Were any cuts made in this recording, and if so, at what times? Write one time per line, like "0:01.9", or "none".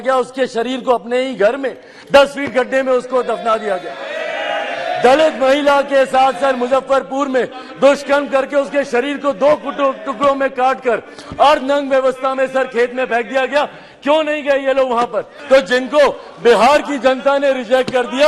0:15.3